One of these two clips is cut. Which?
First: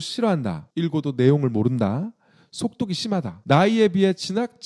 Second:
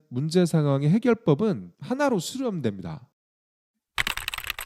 second; 1 cut; at 3.0 s

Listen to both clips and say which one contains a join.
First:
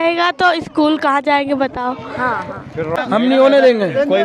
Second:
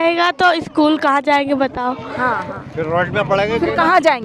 first; 1 cut; at 3.0 s

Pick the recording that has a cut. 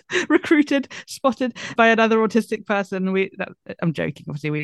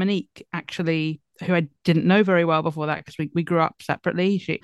first; 1 cut; at 1.7 s

